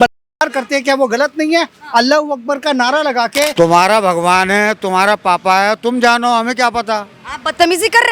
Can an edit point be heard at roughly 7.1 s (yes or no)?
no